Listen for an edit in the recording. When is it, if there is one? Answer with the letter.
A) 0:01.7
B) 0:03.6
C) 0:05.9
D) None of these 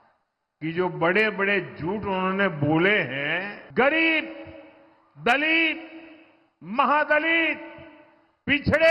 B